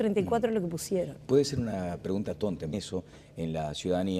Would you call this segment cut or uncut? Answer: uncut